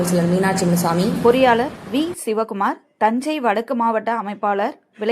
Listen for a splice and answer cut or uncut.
cut